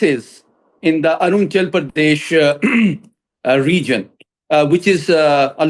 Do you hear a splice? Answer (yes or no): no